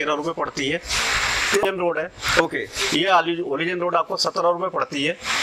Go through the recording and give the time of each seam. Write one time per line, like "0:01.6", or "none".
0:01.6